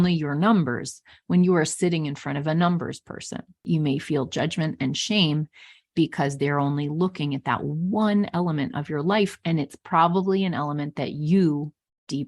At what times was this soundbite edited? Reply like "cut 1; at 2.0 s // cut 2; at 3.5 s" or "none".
cut 1; at 3.6 s